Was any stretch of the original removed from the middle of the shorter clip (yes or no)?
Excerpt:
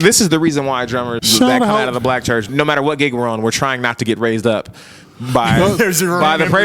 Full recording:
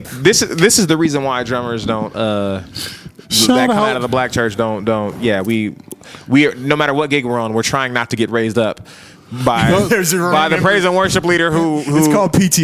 yes